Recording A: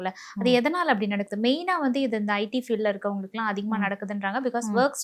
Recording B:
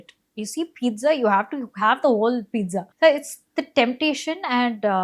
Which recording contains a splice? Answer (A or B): B